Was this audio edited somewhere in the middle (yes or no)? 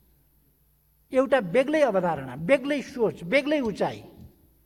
no